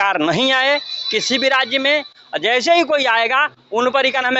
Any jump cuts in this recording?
no; 0 cuts

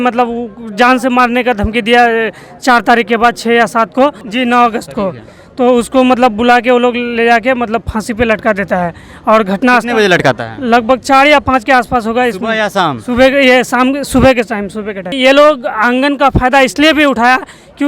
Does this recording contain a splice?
yes; 2 cuts; at 4.2 s, 15.1 s

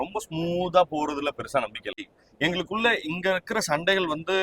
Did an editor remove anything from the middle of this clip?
yes; 1 cut; at 2.0 s

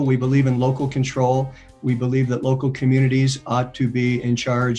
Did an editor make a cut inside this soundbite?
no; 0 cuts

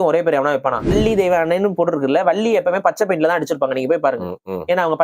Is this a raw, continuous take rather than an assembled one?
no; 1 cut; at 0.9 s

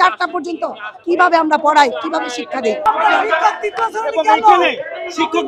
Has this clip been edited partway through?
yes; 1 cut; at 2.8 s

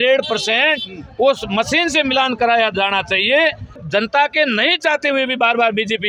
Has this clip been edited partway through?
yes; 1 cut; at 3.8 s

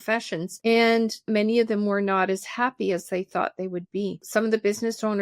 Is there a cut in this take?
yes; 1 cut; at 1.3 s

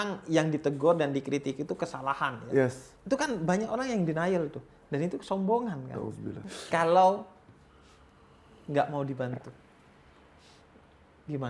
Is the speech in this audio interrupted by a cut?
yes; 1 cut; at 6.3 s

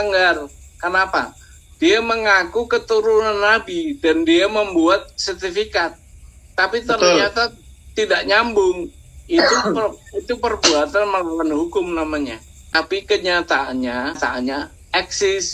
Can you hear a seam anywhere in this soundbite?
yes; 2 cuts; at 12.8 s, 14.3 s

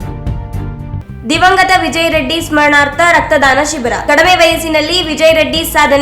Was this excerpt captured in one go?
no; 1 cut; at 1.0 s

